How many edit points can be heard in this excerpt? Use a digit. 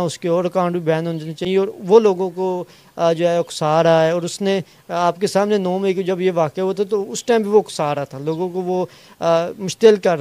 0